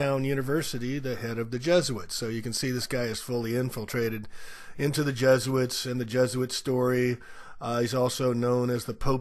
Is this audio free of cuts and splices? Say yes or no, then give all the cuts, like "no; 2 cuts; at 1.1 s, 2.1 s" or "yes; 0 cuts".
no; 1 cut; at 6.5 s